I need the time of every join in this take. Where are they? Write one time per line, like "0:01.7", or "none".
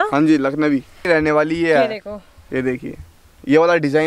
0:01.0